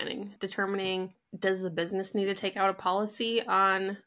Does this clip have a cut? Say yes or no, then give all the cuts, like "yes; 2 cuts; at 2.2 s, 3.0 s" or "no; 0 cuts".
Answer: yes; 1 cut; at 1.2 s